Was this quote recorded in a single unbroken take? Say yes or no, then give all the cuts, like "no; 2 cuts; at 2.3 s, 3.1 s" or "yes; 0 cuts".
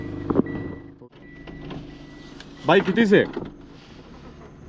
no; 1 cut; at 0.9 s